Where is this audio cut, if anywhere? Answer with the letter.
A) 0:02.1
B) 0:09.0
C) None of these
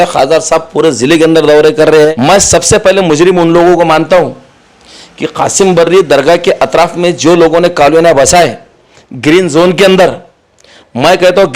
A